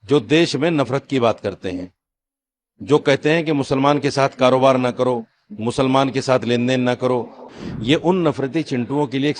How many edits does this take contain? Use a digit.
1